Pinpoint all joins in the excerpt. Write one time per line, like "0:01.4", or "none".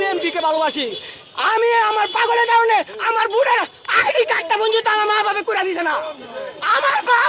none